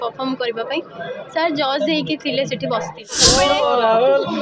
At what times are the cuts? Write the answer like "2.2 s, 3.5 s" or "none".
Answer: 3.2 s